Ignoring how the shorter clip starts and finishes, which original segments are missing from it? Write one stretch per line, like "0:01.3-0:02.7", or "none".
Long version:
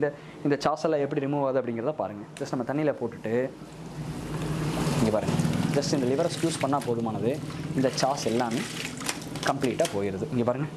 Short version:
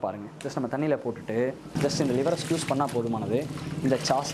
0:03.7-0:05.7